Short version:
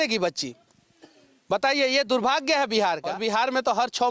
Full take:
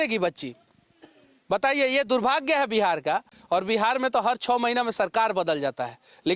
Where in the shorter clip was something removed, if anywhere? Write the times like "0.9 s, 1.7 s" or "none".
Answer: 3.1 s